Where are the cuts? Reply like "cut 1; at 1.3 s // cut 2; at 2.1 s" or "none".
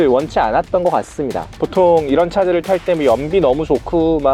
cut 1; at 1.5 s